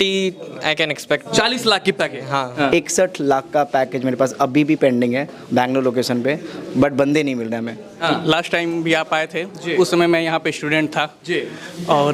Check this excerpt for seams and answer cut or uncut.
cut